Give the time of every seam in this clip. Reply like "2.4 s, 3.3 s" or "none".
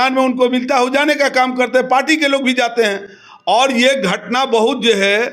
none